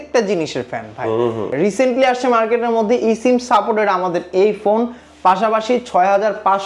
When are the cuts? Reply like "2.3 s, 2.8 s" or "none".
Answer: 1.5 s